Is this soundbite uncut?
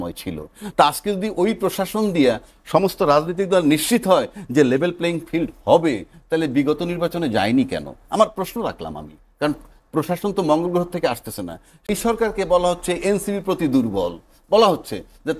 no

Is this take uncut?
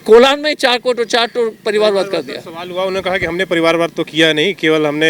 yes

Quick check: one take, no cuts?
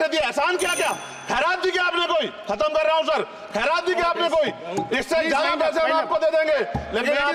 yes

